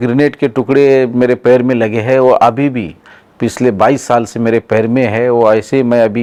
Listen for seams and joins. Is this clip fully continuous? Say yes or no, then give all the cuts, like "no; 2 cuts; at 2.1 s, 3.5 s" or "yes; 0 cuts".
yes; 0 cuts